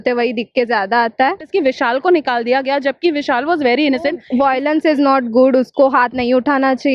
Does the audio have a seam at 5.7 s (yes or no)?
no